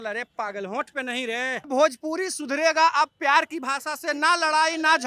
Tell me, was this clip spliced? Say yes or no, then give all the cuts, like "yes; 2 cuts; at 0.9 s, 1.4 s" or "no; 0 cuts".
yes; 1 cut; at 1.7 s